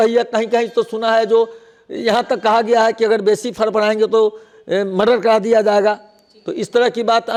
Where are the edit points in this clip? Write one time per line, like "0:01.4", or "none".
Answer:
none